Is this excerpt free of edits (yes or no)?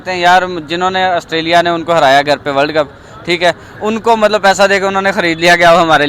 yes